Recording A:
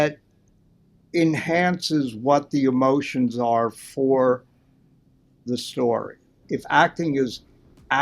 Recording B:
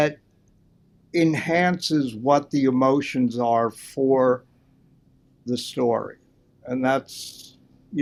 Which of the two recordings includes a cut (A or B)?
A